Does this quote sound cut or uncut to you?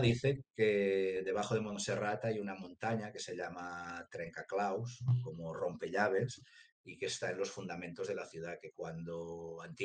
uncut